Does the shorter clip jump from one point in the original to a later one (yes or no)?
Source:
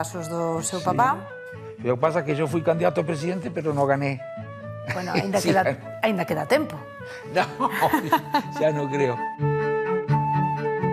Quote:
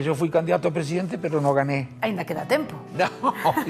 yes